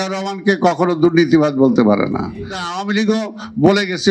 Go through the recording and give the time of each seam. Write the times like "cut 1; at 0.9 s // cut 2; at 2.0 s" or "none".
cut 1; at 2.7 s